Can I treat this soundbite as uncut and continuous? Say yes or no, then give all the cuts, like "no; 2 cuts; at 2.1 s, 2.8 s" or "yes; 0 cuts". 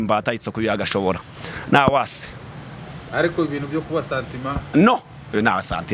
yes; 0 cuts